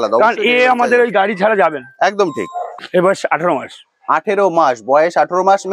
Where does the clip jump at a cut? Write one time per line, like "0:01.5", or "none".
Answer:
0:02.8